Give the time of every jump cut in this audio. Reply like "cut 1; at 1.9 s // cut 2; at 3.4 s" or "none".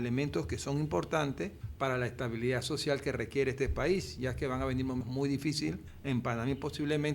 cut 1; at 1.6 s // cut 2; at 5.0 s // cut 3; at 5.9 s